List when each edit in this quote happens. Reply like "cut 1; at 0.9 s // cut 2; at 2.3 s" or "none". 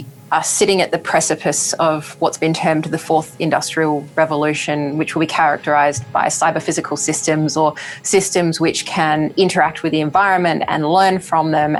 none